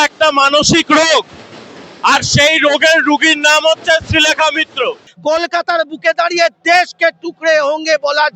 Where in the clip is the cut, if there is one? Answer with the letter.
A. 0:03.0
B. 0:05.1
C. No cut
B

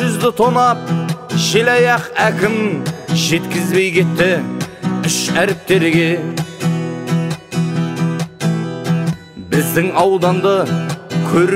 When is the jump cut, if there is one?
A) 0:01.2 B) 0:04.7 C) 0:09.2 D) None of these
C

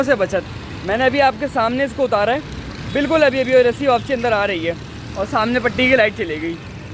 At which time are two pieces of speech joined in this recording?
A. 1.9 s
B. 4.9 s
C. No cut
C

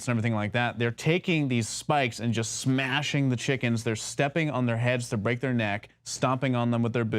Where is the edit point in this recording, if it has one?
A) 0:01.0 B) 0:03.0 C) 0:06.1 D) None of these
B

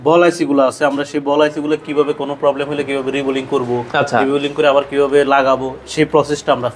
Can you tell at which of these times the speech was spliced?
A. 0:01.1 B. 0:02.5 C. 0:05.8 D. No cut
D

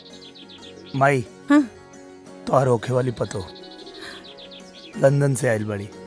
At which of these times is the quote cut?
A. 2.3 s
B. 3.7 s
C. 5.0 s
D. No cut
D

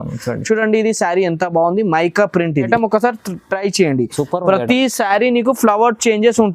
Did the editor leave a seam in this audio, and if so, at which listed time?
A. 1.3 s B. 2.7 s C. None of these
B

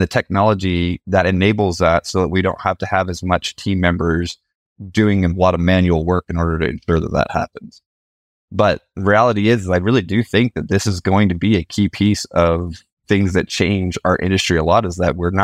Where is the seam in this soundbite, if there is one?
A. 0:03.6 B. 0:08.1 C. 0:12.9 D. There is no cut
B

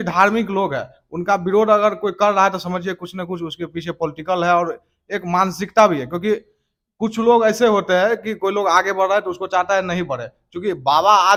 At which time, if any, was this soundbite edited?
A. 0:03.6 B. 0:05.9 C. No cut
C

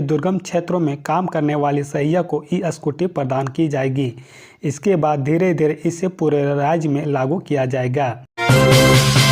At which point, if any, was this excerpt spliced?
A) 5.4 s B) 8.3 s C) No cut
B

